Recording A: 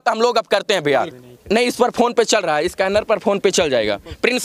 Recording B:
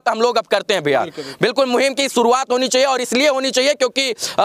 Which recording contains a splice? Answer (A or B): A